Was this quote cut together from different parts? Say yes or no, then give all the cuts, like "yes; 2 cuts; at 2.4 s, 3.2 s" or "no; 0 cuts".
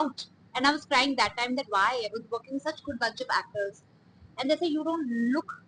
no; 0 cuts